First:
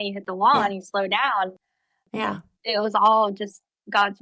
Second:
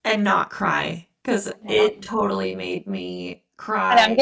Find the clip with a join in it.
first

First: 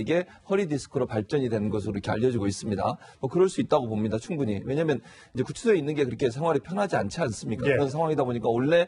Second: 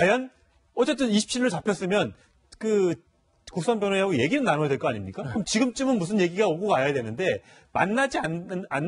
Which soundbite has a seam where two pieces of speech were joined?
first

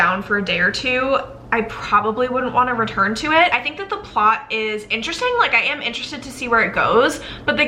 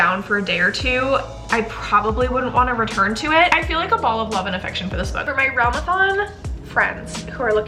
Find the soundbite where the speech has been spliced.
second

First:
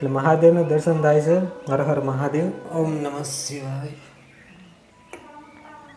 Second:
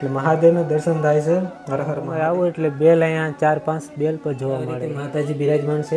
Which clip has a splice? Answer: second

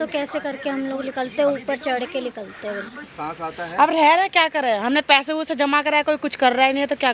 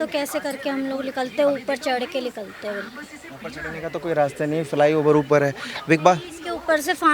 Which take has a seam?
first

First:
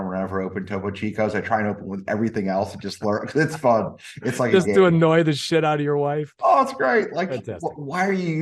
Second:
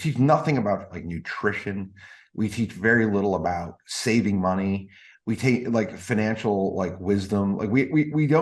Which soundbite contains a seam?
second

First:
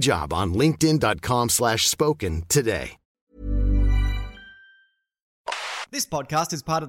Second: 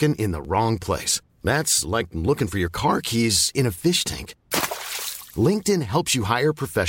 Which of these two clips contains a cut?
first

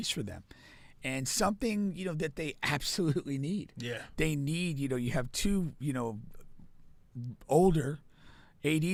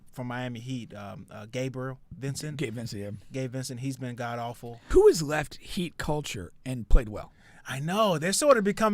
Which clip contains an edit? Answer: second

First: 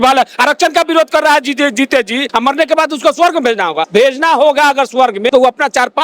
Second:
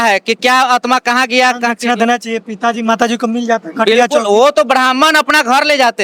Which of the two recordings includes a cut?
first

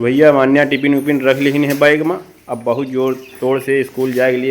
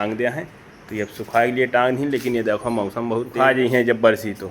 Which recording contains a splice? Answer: second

